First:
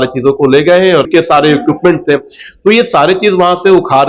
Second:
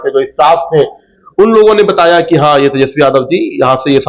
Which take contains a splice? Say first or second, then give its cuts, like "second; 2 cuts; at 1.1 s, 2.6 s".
first; 1 cut; at 1.0 s